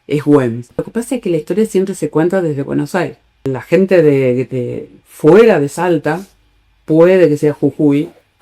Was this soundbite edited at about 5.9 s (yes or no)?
no